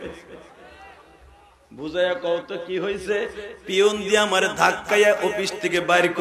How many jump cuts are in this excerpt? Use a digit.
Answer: 0